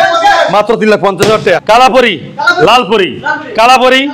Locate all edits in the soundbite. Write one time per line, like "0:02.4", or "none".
0:01.6